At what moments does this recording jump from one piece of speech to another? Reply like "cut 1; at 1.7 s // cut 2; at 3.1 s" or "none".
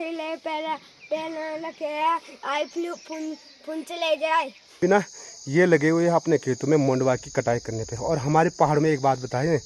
cut 1; at 4.7 s